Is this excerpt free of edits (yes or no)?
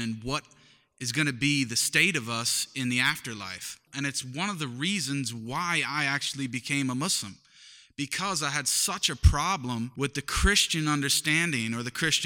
no